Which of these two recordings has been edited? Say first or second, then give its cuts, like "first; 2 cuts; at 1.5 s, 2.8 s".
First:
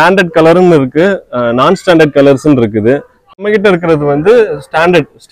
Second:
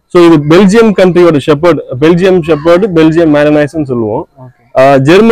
first; 1 cut; at 3.4 s